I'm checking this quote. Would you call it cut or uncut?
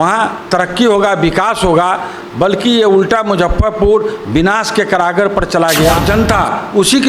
cut